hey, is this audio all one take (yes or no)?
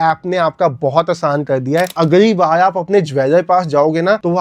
no